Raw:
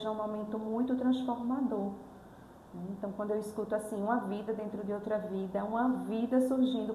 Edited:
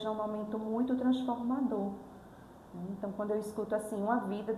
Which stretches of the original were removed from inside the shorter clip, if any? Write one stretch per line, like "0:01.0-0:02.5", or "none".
none